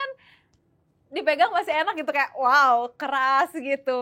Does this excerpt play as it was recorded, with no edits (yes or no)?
yes